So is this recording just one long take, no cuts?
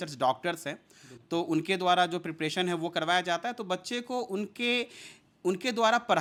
yes; 0 cuts

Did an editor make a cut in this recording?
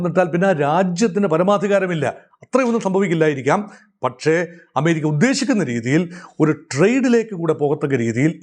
no; 0 cuts

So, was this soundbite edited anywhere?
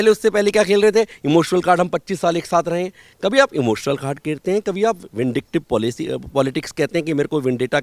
no; 0 cuts

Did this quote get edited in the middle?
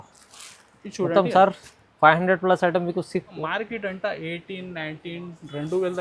yes; 1 cut; at 3.4 s

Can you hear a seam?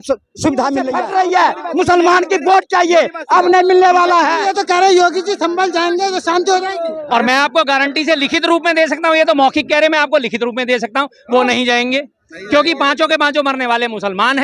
yes; 2 cuts; at 0.9 s, 4.5 s

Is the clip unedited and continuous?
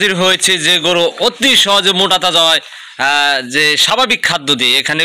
yes; 0 cuts

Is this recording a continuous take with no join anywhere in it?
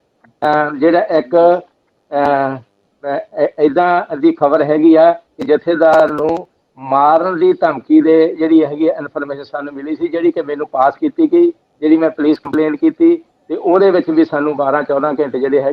yes; 0 cuts

